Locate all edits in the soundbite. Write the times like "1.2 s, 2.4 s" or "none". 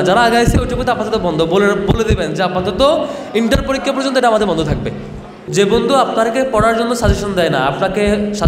5.4 s